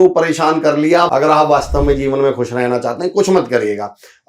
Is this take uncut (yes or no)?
no